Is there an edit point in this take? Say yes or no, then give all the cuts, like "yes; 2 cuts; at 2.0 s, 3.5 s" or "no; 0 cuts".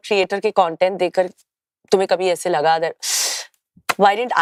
no; 0 cuts